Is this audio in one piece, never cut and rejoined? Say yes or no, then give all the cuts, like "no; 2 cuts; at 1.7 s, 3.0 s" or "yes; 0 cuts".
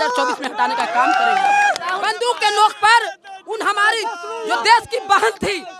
no; 1 cut; at 1.9 s